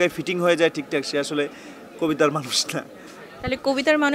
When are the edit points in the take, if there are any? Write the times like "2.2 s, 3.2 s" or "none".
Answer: none